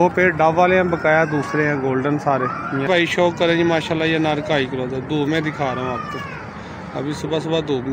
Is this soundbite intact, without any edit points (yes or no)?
no